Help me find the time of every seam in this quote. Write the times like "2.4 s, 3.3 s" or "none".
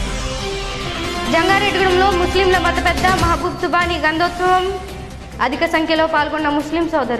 1.1 s

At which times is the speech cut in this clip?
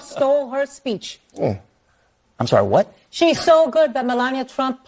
none

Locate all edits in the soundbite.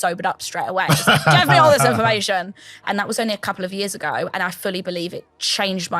2.8 s

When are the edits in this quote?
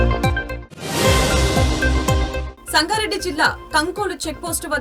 2.5 s

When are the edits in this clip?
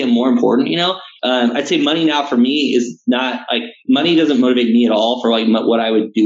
1.1 s

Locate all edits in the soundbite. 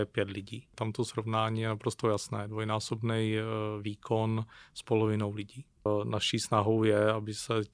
0.8 s, 5.9 s

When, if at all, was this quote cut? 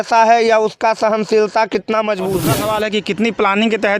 2.4 s

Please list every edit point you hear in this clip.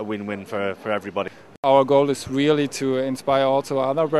1.4 s

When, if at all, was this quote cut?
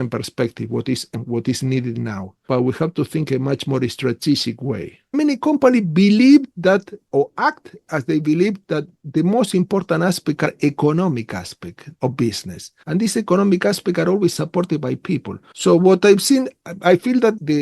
5.1 s

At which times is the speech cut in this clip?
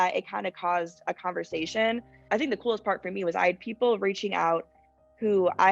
2.1 s

